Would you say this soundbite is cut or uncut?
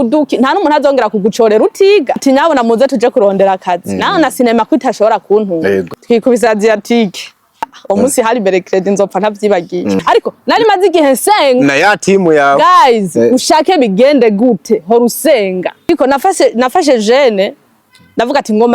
cut